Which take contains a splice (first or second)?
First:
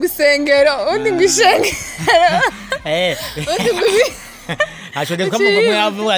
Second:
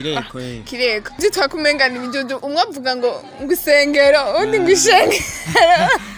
second